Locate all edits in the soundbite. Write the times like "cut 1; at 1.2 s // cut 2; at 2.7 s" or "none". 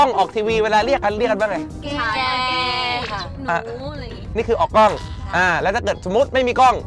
none